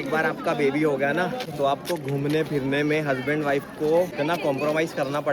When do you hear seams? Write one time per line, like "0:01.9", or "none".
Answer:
0:01.4
0:04.1